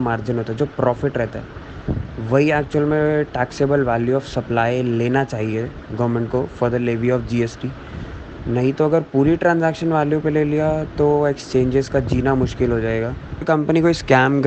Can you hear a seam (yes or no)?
yes